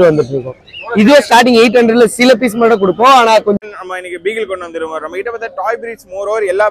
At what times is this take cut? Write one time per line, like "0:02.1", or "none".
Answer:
0:03.6